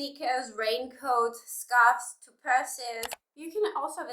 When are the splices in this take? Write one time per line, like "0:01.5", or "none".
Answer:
0:03.1